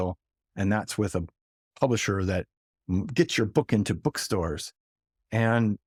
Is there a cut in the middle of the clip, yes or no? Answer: no